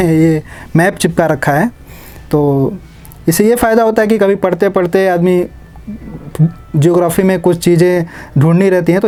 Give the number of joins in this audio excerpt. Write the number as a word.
zero